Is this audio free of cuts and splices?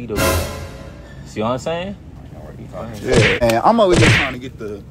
no; 1 cut; at 3.4 s

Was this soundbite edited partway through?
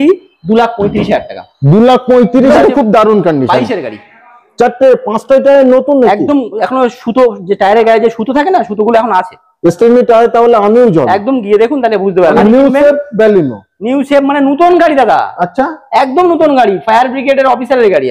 yes; 2 cuts; at 2.5 s, 12.4 s

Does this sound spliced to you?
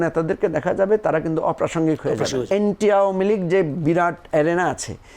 yes; 1 cut; at 2.5 s

